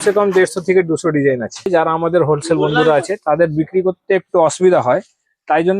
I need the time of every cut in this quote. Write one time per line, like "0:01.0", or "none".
0:01.7